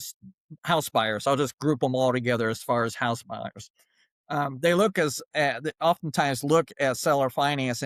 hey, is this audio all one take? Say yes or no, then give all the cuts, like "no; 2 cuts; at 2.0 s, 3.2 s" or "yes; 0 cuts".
yes; 0 cuts